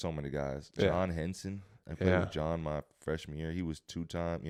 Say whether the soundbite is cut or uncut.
uncut